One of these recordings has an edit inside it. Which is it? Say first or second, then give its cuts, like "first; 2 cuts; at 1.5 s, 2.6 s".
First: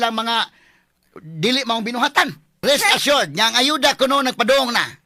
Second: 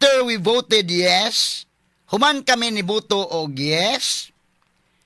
first; 1 cut; at 2.6 s